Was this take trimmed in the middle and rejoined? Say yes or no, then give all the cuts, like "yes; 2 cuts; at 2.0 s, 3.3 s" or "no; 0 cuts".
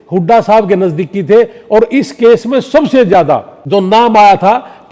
yes; 1 cut; at 3.5 s